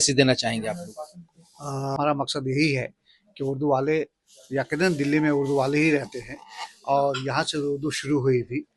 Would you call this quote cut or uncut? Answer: cut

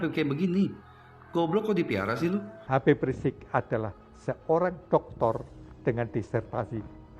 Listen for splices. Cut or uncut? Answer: cut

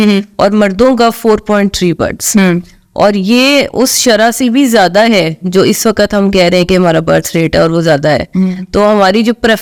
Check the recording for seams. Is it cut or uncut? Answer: uncut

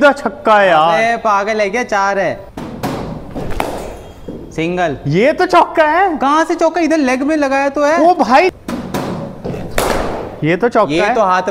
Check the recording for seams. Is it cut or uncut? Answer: cut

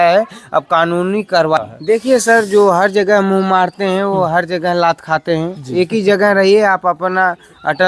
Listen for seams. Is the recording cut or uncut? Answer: cut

